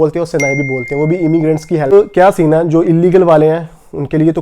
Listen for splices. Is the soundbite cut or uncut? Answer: cut